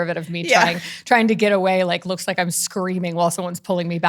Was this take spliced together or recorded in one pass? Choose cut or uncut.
uncut